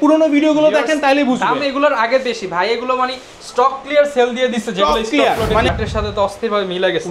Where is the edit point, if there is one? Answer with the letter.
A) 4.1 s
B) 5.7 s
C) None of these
B